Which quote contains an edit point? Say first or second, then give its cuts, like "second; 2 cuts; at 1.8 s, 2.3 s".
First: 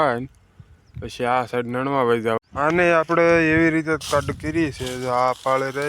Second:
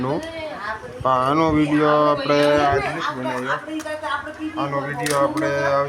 first; 1 cut; at 2.5 s